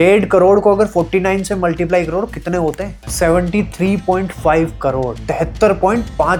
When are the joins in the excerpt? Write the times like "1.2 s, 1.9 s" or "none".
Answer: none

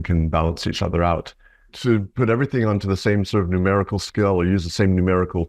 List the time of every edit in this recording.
1.7 s

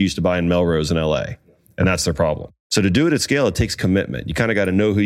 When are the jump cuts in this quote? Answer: 2.5 s

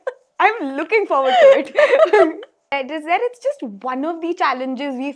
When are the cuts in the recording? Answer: 2.7 s

